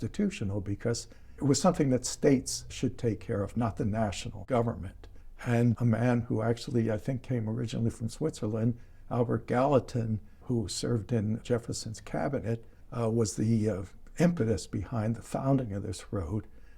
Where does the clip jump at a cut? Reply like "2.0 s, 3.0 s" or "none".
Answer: 1.3 s, 5.6 s, 10.3 s, 11.4 s, 12.8 s